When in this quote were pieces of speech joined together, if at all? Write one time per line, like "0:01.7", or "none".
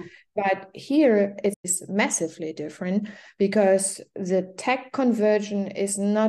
0:01.7